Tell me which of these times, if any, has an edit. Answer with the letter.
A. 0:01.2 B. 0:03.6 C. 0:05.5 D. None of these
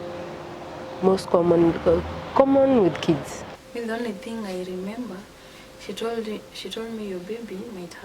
B